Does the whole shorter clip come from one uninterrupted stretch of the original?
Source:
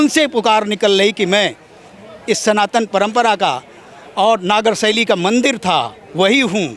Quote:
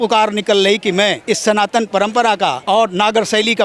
no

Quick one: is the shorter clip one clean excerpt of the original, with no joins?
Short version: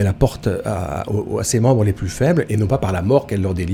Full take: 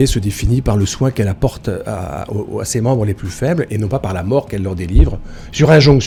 yes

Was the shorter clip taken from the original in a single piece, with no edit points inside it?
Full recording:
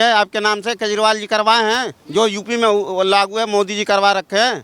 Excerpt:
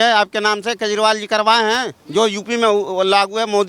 yes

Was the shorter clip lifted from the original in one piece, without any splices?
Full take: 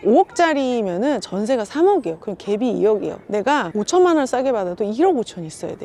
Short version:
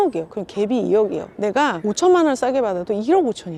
yes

